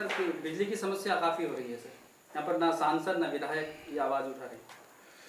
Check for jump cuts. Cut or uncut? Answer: uncut